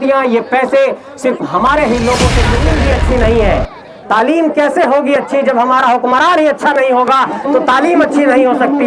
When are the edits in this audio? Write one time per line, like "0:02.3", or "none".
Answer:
0:02.7